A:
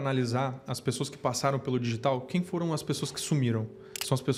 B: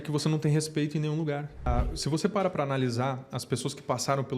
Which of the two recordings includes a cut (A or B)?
B